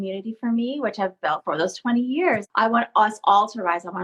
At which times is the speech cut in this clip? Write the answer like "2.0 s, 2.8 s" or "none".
1.4 s, 2.4 s